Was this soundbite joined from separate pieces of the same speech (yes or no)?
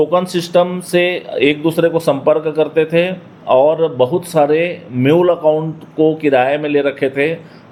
no